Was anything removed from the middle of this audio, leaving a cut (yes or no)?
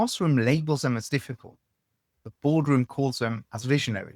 no